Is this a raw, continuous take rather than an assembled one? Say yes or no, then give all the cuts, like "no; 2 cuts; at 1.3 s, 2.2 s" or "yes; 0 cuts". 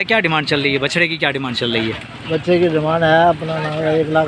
yes; 0 cuts